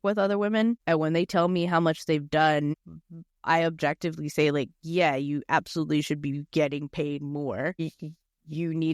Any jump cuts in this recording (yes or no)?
yes